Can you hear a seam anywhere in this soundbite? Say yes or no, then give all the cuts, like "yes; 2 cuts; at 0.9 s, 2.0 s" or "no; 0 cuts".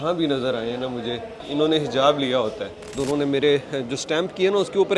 yes; 2 cuts; at 1.3 s, 2.9 s